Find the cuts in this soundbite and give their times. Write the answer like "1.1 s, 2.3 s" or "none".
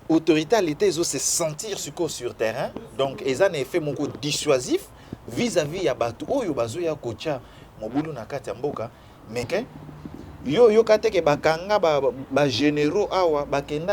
9.5 s